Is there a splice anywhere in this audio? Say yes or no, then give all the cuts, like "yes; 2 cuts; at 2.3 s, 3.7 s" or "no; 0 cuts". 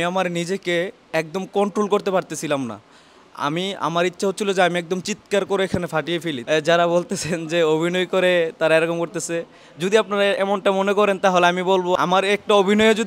yes; 2 cuts; at 6.4 s, 12.0 s